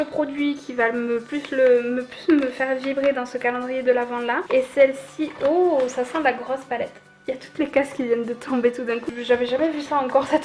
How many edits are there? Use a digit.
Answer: 2